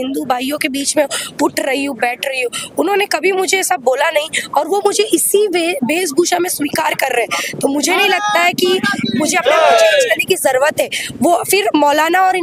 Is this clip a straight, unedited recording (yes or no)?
yes